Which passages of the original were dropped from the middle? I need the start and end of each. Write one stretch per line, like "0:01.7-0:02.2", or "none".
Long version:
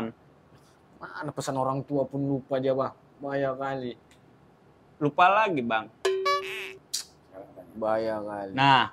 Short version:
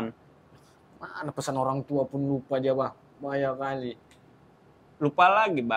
none